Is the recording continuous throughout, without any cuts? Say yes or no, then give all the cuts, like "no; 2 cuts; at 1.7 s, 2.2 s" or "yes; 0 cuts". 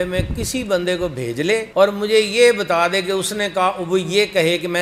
yes; 0 cuts